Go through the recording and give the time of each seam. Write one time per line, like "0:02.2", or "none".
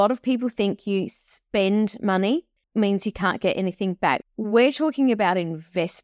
0:02.6
0:04.2